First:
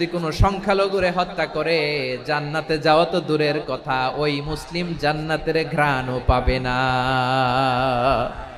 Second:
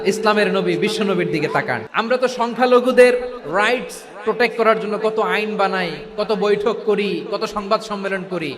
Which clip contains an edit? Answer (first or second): second